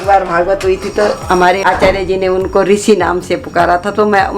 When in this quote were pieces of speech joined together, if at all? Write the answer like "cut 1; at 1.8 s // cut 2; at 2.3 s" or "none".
cut 1; at 1.6 s